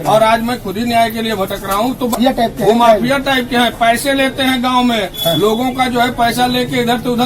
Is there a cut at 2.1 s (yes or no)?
yes